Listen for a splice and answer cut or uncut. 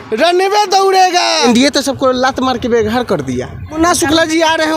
cut